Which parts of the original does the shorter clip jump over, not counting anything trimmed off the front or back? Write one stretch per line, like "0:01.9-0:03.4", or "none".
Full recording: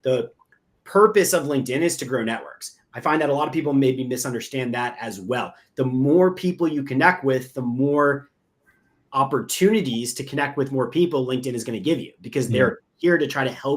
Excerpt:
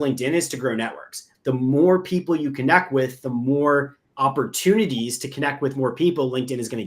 0:02.8-0:05.6
0:08.3-0:09.0